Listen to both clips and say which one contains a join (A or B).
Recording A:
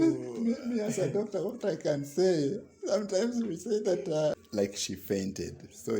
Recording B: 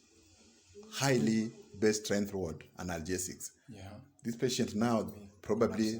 A